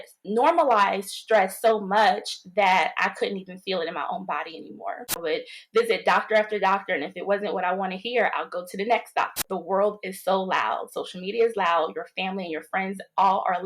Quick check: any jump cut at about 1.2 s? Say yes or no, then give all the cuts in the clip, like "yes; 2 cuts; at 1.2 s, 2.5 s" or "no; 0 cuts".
no; 2 cuts; at 5.2 s, 9.4 s